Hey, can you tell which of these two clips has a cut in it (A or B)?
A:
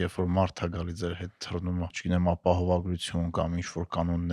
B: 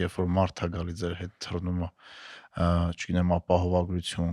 A